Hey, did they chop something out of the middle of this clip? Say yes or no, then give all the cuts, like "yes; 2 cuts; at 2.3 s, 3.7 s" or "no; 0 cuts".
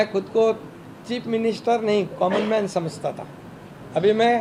no; 0 cuts